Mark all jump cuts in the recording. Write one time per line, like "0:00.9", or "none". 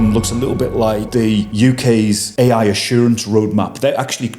0:01.4
0:02.3

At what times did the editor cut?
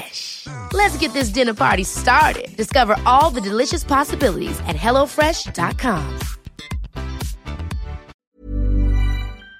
0:08.2

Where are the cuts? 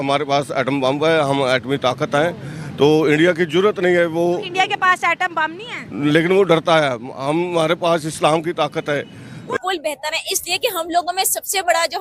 0:09.1

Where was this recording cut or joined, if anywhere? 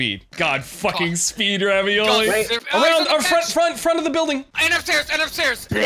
none

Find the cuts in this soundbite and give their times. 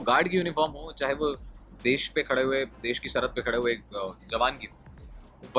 none

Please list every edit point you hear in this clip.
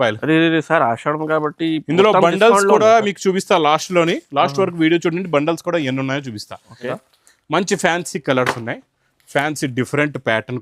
0:06.8

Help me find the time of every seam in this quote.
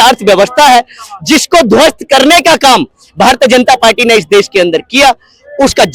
none

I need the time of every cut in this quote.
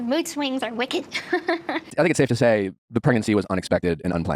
0:01.9

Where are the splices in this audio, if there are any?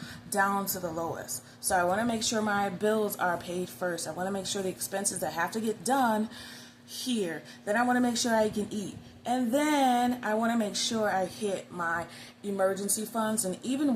none

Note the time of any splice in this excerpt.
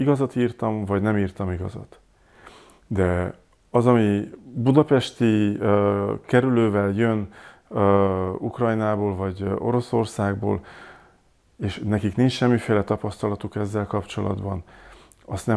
none

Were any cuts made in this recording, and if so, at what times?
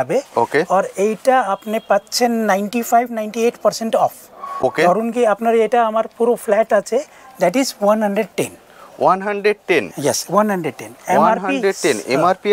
none

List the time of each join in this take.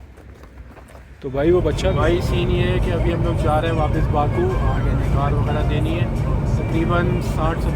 0:01.8

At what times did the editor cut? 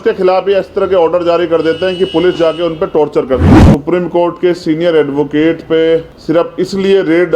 0:03.6
0:06.1

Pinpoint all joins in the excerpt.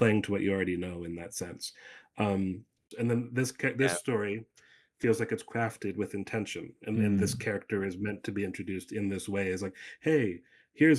0:02.9

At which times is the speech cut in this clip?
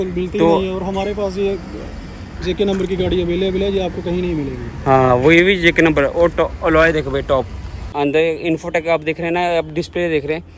0:07.8

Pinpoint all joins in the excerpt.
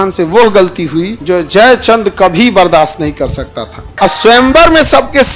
0:01.1
0:03.8

